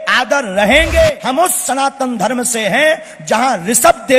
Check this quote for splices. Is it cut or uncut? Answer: cut